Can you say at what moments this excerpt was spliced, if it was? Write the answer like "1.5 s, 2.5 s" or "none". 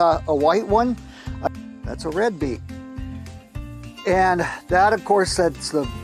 1.5 s